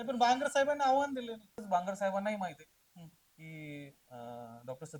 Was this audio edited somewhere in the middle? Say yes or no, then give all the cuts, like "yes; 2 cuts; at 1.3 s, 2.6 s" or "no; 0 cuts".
yes; 1 cut; at 1.6 s